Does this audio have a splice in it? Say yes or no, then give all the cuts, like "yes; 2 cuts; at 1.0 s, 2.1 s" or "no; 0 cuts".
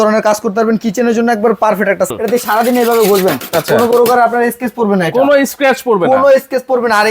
yes; 1 cut; at 2.1 s